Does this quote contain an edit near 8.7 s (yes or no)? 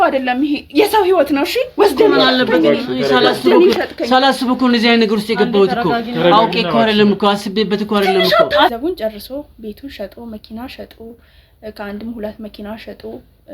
yes